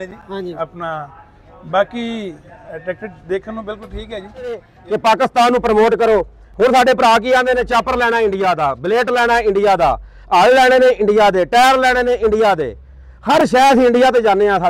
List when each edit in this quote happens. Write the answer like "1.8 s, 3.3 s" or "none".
4.7 s